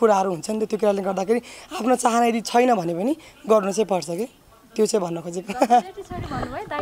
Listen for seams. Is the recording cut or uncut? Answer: uncut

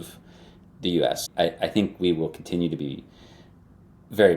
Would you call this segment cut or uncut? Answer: cut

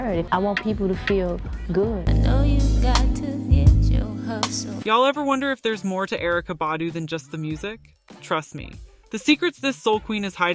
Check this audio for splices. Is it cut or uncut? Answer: cut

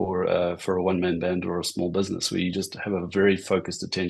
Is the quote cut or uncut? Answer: uncut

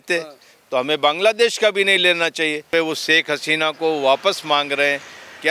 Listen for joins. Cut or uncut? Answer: cut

